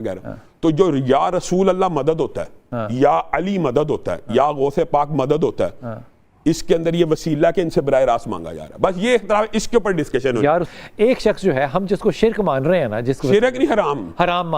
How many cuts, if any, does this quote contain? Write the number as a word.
one